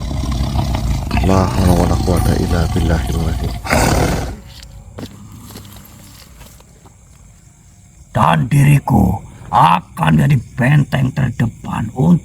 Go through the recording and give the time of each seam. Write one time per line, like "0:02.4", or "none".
0:05.0